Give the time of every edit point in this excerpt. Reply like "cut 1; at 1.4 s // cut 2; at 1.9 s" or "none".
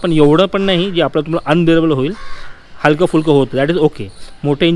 none